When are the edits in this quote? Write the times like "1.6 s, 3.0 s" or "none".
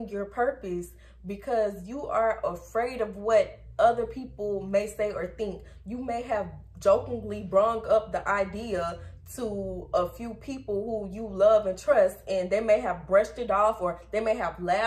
none